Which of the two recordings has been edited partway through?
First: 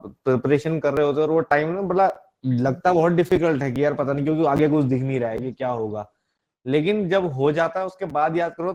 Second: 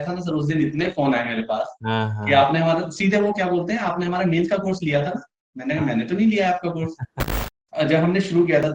second; 1 cut; at 7.3 s

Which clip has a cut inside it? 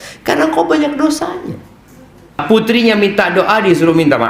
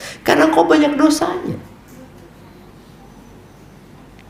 first; 1 cut; at 2.4 s

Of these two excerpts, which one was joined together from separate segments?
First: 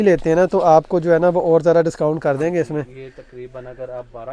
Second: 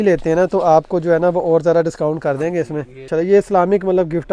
second; 1 cut; at 3.1 s

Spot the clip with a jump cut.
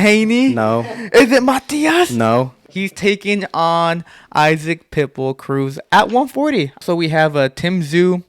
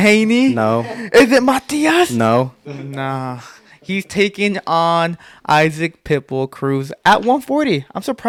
first; 2 cuts; at 2.6 s, 6.8 s

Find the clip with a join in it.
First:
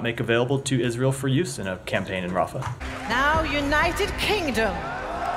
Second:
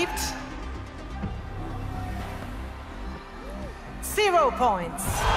first; 1 cut; at 2.8 s

